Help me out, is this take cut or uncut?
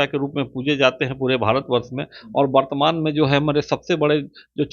uncut